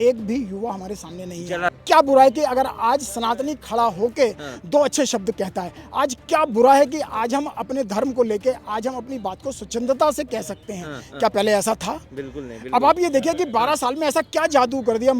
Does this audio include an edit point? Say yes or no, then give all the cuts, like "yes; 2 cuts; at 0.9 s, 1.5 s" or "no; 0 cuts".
yes; 1 cut; at 1.7 s